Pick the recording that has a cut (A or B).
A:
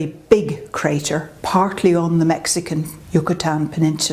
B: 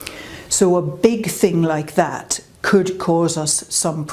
A